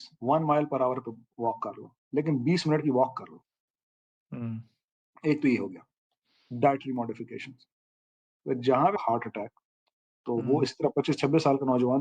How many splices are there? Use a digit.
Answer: 1